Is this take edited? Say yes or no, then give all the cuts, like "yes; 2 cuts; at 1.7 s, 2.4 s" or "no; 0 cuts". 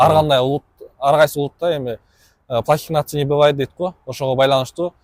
no; 0 cuts